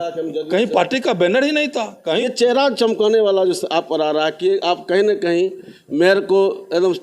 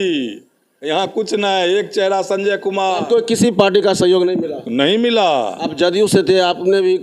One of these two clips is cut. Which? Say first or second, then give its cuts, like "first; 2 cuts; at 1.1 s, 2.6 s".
first; 1 cut; at 2.2 s